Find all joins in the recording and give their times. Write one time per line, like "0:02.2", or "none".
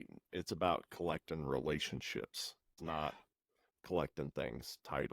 0:02.8